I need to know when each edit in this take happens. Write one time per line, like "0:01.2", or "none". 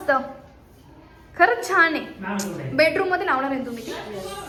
none